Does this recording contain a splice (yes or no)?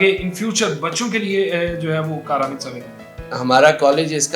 yes